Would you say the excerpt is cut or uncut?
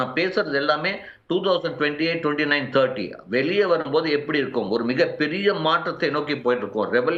uncut